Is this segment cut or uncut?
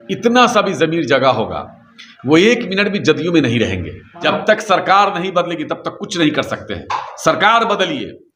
cut